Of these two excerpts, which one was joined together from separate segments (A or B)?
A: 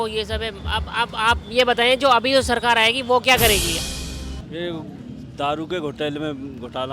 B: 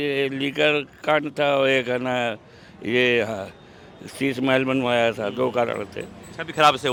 A